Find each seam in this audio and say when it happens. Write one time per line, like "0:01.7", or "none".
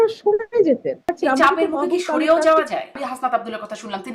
0:01.1
0:03.0